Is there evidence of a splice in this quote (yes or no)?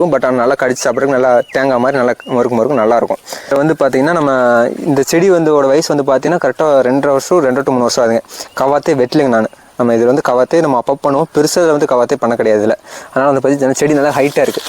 yes